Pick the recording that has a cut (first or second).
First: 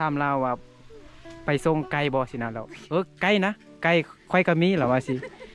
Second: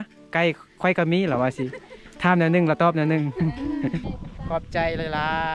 second